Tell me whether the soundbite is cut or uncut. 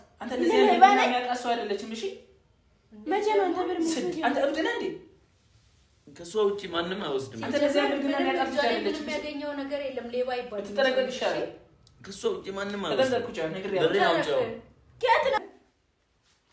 cut